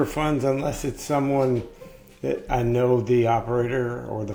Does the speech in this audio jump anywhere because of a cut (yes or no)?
no